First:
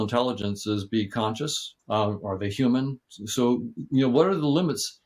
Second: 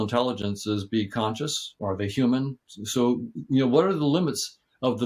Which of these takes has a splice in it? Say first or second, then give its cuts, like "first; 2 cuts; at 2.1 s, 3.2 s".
second; 1 cut; at 1.8 s